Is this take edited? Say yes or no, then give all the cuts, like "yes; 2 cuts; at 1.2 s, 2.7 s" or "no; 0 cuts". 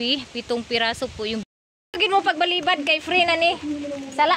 yes; 1 cut; at 1.5 s